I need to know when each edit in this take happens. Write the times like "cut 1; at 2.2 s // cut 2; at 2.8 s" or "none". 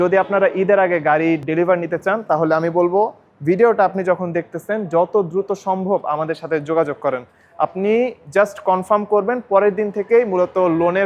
none

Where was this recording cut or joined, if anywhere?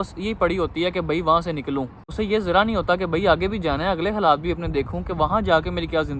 cut 1; at 2.0 s

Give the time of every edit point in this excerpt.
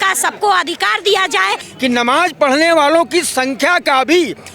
cut 1; at 1.6 s

